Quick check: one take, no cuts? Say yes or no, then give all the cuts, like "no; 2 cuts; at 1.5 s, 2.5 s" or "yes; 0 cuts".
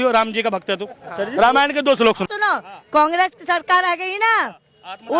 no; 1 cut; at 2.3 s